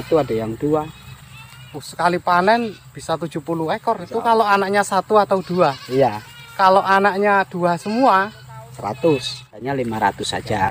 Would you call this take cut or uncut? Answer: cut